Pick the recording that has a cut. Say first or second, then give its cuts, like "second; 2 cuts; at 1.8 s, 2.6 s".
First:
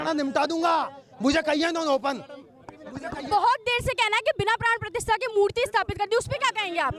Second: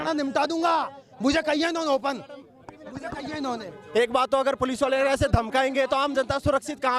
first; 1 cut; at 3.3 s